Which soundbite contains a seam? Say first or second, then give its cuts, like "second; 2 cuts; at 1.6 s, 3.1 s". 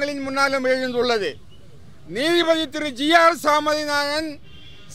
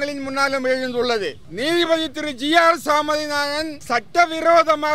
second; 2 cuts; at 1.4 s, 3.8 s